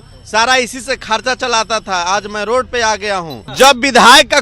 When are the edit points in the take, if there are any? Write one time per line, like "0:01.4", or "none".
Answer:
0:03.4